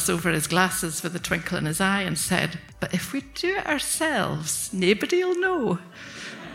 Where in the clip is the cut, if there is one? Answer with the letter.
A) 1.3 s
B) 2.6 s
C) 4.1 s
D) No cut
B